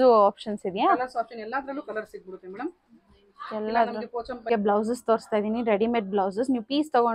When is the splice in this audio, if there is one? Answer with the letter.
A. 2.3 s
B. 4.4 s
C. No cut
B